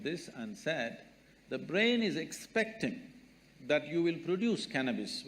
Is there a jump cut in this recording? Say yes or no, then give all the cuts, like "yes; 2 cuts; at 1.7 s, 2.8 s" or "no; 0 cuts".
no; 0 cuts